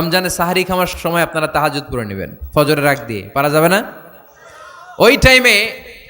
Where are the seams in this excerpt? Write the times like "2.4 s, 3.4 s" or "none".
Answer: 0.9 s